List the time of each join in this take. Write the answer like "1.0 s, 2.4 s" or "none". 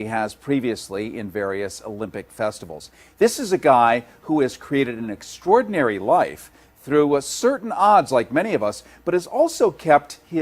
4.3 s